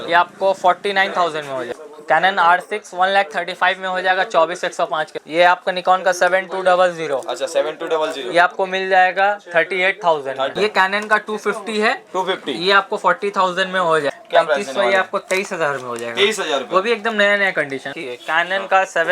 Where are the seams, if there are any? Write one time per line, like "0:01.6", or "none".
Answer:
0:01.7
0:05.2
0:10.5
0:14.1
0:17.9

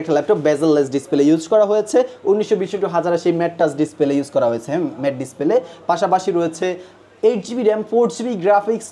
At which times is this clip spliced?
none

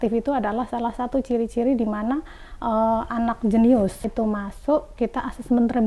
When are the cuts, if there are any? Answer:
0:04.1

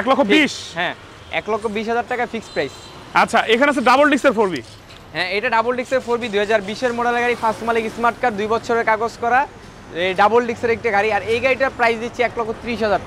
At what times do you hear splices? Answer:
none

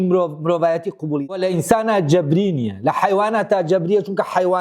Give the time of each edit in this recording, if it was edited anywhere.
0:01.3

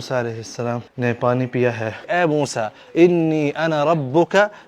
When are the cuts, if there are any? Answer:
0:00.9
0:02.0

